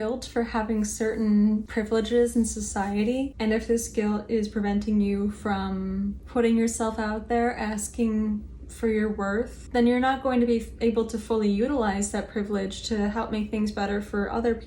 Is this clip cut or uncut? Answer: cut